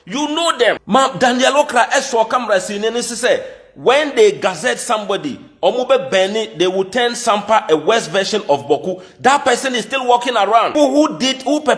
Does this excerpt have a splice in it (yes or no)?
yes